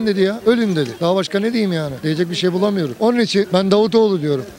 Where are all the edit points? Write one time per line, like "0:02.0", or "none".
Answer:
none